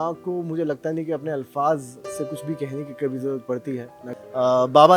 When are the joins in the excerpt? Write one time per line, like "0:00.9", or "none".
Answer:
0:04.0